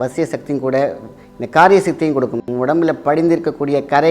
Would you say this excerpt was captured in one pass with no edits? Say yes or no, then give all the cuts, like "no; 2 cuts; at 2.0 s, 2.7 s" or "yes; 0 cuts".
no; 1 cut; at 2.4 s